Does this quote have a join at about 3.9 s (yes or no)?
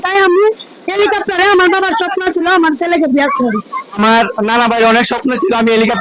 yes